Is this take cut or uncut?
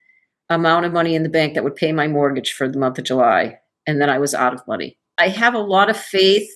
cut